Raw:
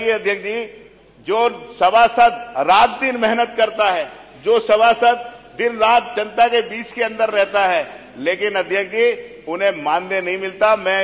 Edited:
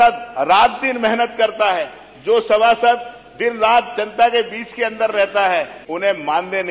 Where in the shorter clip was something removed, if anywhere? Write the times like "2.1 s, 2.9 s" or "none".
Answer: 5.8 s